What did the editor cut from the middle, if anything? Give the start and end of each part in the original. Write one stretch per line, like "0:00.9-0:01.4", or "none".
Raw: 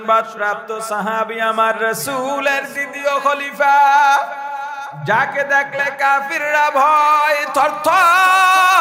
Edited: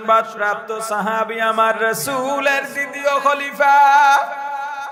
none